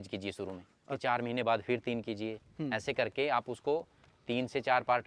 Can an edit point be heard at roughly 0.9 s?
yes; 1 cut; at 0.9 s

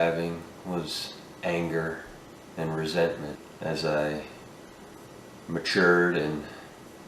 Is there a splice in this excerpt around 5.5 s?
no; 1 cut; at 3.5 s

